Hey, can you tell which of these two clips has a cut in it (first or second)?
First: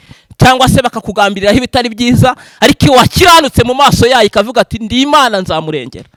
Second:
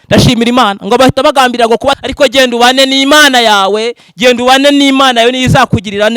second